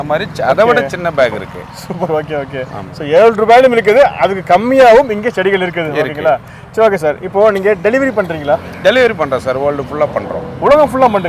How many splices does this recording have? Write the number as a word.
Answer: zero